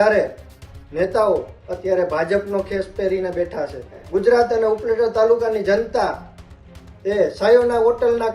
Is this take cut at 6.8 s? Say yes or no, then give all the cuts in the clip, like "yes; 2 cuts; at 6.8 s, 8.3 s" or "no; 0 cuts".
no; 1 cut; at 4.0 s